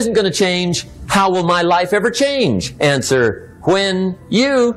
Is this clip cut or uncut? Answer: uncut